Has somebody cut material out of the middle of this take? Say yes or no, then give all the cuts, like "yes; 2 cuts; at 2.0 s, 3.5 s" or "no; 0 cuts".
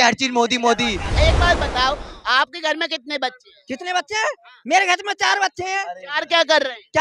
yes; 1 cut; at 1.0 s